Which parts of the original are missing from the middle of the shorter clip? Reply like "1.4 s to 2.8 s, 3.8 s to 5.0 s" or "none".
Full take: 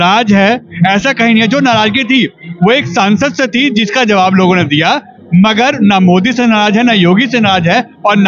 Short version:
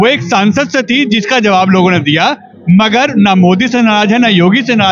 none